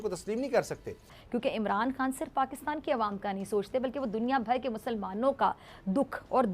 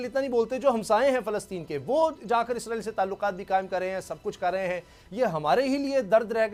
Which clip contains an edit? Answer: first; 1 cut; at 1.2 s

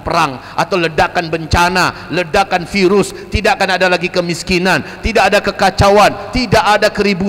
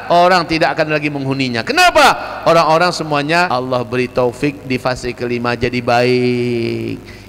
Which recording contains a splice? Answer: second; 1 cut; at 3.5 s

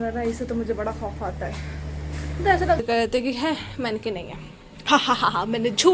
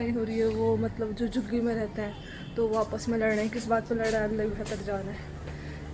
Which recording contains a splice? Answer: first; 1 cut; at 2.8 s

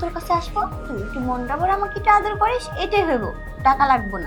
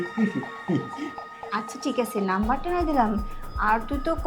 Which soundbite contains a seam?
second; 1 cut; at 1.3 s

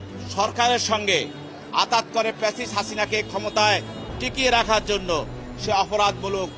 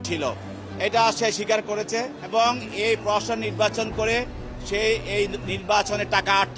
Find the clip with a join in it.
second; 1 cut; at 2.2 s

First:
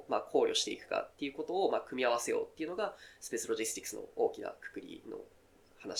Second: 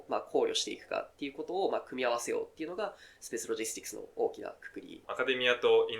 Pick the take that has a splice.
second; 1 cut; at 5.0 s

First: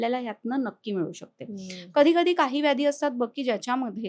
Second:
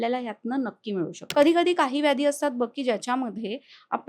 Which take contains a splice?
second; 1 cut; at 1.2 s

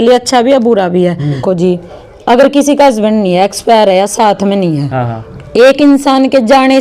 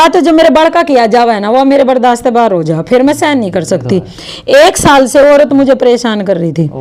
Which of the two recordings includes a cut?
first; 1 cut; at 1.4 s

